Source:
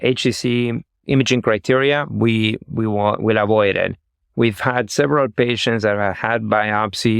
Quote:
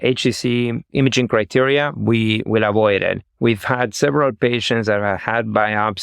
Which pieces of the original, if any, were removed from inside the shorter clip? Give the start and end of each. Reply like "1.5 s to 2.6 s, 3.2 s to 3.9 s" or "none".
0.8 s to 1.0 s, 2.6 s to 3.2 s, 4.0 s to 4.2 s